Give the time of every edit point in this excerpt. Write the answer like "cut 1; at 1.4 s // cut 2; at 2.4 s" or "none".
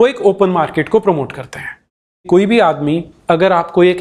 cut 1; at 2.2 s